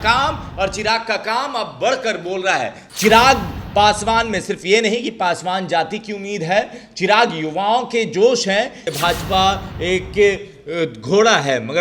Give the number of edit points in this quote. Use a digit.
2